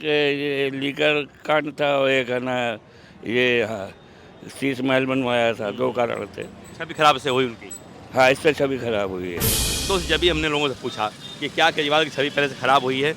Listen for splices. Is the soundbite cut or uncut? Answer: cut